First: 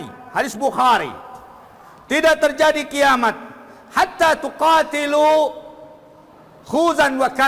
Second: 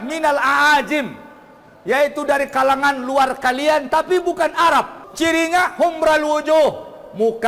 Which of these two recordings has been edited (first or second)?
second